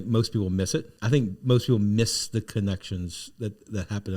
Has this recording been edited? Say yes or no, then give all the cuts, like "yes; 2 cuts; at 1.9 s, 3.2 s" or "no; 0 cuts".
yes; 1 cut; at 0.9 s